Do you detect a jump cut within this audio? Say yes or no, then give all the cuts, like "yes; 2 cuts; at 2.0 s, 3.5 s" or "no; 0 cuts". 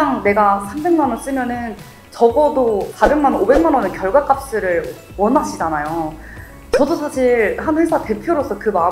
no; 0 cuts